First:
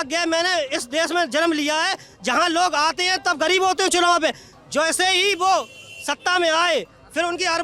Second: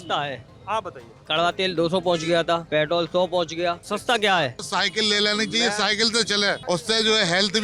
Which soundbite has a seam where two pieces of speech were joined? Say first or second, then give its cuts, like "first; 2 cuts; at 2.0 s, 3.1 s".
second; 4 cuts; at 2.6 s, 3.8 s, 4.6 s, 6.6 s